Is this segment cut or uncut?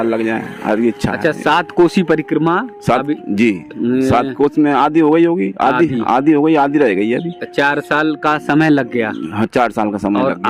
uncut